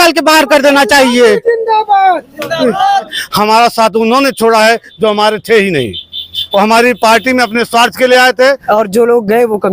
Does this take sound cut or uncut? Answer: cut